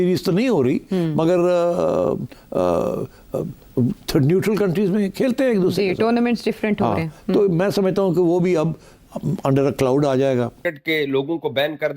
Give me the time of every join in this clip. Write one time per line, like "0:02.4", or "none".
0:10.6

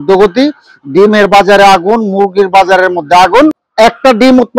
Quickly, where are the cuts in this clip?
0:03.6

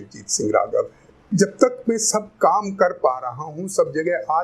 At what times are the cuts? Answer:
0:01.3

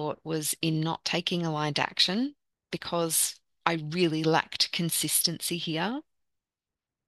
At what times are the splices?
0:02.5

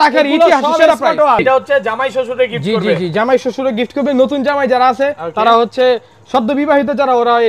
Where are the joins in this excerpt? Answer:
0:01.4

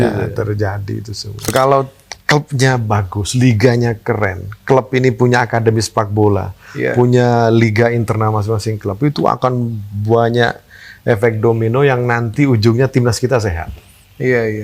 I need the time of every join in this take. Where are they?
0:01.5

